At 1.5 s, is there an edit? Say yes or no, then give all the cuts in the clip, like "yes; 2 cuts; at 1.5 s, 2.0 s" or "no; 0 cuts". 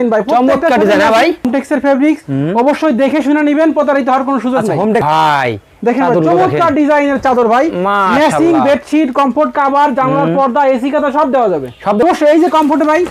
yes; 3 cuts; at 1.5 s, 5.0 s, 12.0 s